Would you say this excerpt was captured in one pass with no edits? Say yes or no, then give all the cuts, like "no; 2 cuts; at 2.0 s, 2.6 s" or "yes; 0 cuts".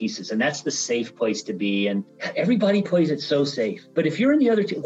no; 2 cuts; at 2.2 s, 3.8 s